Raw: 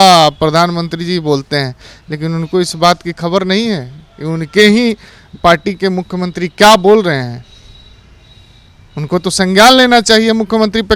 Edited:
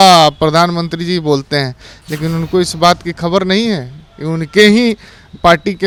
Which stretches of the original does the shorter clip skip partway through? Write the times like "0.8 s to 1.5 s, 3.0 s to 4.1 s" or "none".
none